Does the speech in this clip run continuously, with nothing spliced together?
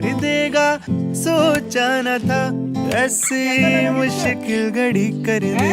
yes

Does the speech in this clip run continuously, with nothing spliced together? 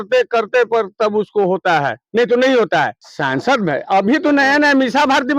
no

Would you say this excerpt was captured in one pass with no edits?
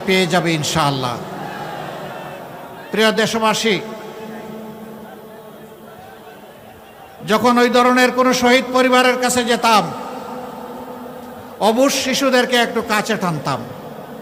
yes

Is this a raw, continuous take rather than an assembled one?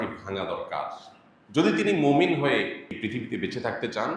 no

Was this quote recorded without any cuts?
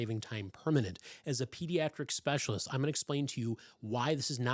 yes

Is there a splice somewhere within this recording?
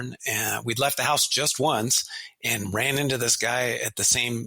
no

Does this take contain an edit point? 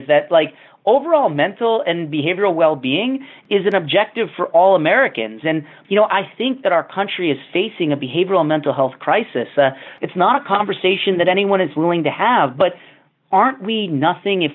yes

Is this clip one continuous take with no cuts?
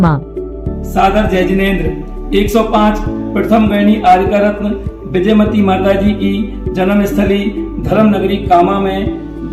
yes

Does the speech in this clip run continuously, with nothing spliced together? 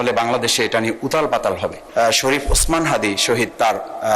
no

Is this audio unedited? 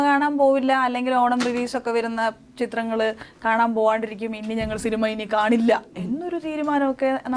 yes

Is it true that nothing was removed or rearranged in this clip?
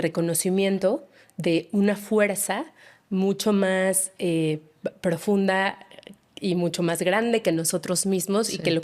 yes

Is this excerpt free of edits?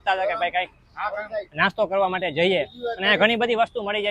yes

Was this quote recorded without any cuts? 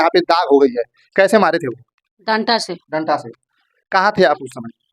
yes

